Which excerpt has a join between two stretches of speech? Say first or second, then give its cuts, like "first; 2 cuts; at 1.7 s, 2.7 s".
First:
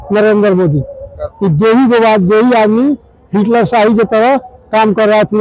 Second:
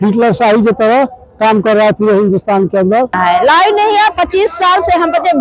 second; 1 cut; at 3.2 s